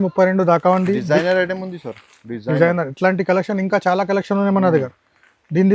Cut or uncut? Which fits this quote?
uncut